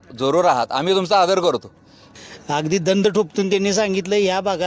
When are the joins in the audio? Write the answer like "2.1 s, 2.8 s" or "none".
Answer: 2.1 s